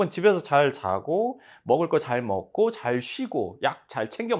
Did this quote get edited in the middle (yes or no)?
no